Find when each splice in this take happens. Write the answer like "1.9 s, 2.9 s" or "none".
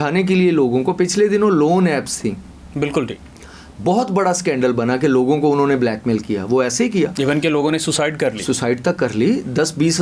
none